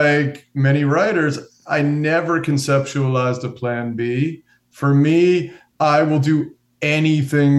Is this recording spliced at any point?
yes; 1 cut; at 5.6 s

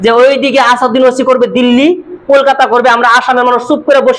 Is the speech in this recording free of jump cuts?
yes; 0 cuts

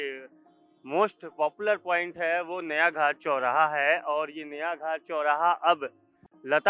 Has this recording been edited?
no; 0 cuts

